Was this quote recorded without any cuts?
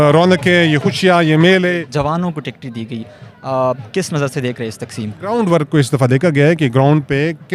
no; 2 cuts; at 1.8 s, 5.3 s

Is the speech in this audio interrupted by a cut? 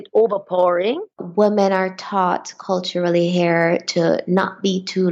yes; 1 cut; at 1.2 s

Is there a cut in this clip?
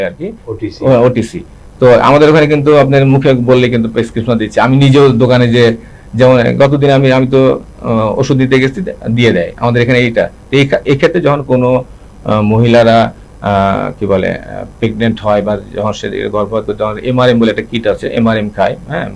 no; 0 cuts

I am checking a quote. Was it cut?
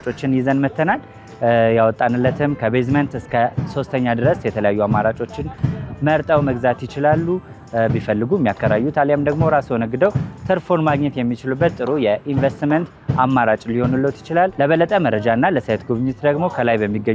no; 0 cuts

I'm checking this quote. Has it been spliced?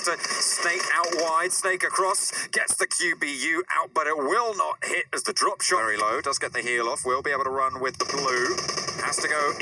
yes; 1 cut; at 5.8 s

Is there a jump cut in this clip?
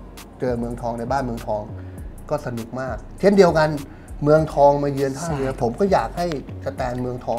no; 0 cuts

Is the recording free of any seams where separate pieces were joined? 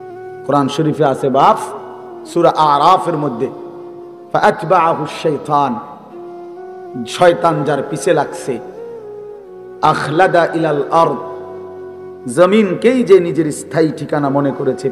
no; 2 cuts; at 5.8 s, 7.1 s

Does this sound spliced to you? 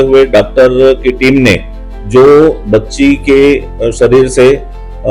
no; 0 cuts

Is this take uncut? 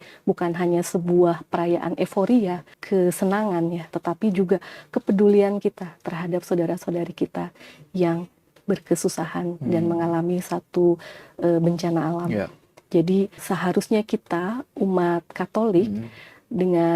no; 2 cuts; at 2.7 s, 13.4 s

